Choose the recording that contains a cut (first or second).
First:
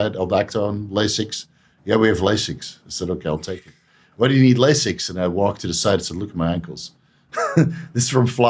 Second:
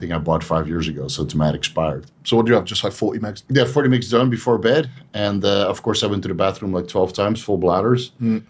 second